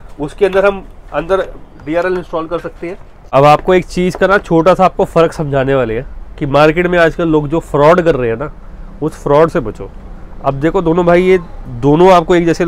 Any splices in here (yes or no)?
yes